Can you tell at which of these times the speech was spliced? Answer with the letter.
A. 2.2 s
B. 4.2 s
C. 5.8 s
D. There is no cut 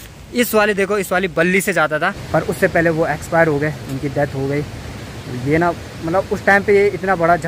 A